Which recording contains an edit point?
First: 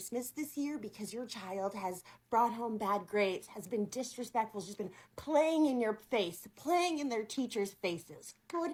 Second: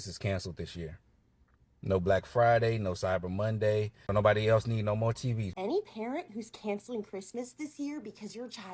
second; 2 cuts; at 4.0 s, 5.4 s

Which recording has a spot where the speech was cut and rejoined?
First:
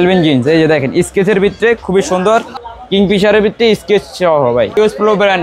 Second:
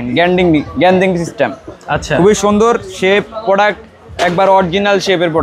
first; 2 cuts; at 2.6 s, 4.8 s

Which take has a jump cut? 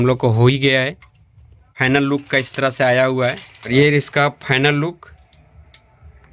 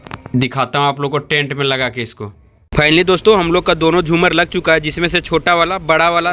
first; 1 cut; at 3.7 s

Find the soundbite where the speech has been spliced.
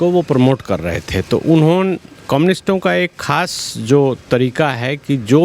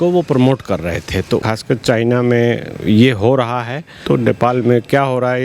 second; 2 cuts; at 1.4 s, 4.0 s

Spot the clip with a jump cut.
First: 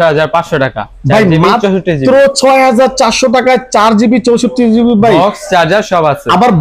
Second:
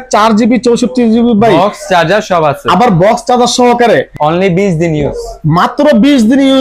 second; 1 cut; at 4.1 s

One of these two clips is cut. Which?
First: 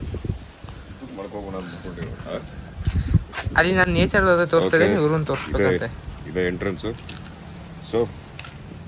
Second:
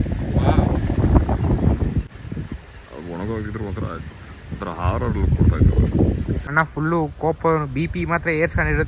second; 2 cuts; at 2.1 s, 6.5 s

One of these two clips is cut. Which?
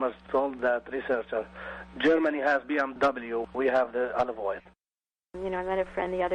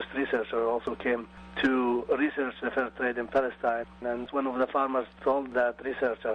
first; 1 cut; at 5.2 s

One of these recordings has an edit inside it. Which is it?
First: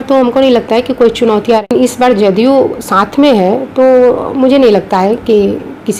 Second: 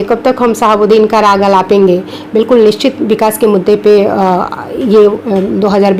first; 1 cut; at 1.6 s

